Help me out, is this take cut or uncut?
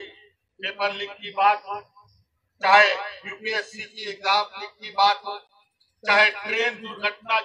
uncut